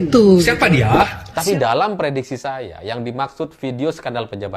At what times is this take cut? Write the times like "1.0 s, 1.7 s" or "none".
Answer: 1.2 s